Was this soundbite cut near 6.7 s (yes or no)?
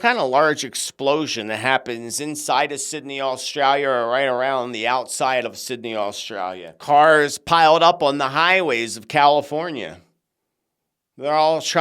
yes